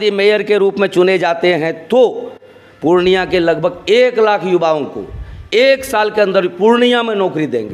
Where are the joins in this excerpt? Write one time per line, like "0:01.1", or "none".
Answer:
none